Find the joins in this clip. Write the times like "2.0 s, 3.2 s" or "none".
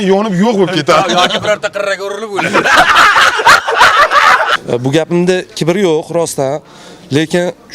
4.5 s